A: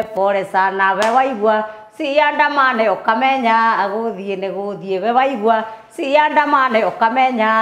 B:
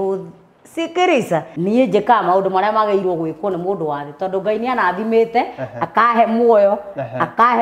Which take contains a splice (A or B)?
B